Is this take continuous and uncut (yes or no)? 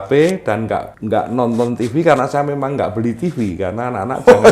no